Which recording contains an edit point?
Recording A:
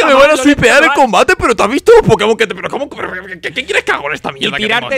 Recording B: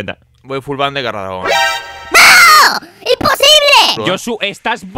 B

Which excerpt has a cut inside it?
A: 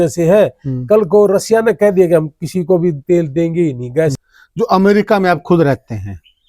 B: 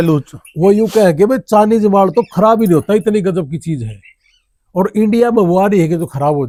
A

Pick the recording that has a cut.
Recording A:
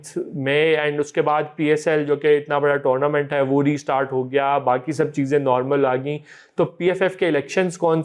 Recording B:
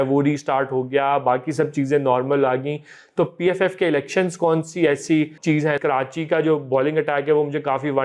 B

